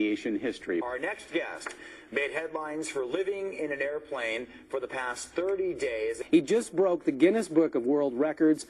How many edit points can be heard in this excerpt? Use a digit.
2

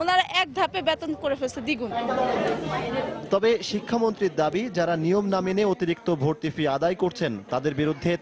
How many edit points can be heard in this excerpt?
0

